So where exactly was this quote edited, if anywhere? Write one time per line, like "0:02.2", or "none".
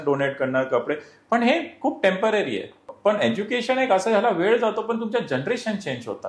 0:02.8